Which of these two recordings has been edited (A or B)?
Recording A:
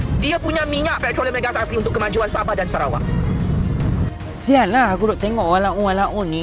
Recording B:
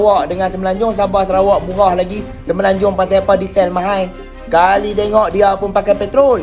A